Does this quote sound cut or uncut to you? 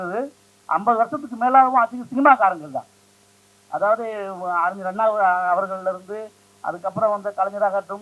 uncut